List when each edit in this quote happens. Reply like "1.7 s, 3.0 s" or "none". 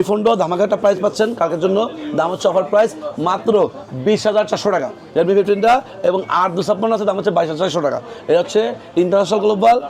none

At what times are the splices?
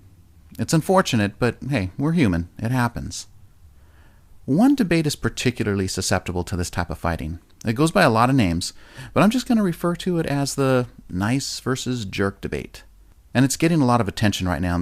none

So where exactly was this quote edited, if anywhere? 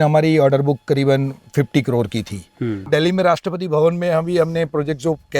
2.8 s

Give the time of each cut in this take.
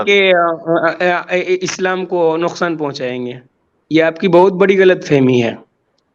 none

